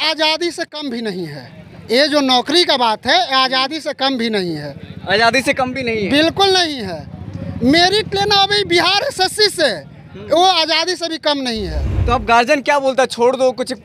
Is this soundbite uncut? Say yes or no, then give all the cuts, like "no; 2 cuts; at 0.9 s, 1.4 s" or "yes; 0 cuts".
no; 1 cut; at 11.9 s